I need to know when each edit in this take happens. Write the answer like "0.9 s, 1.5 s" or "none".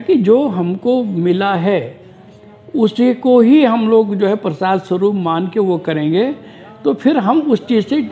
none